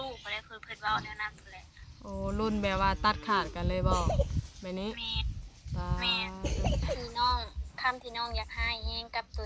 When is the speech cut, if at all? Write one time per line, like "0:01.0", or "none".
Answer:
0:07.0